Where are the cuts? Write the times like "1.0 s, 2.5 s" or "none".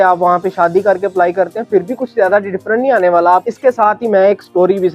3.4 s